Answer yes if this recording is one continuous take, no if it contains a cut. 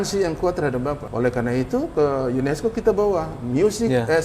no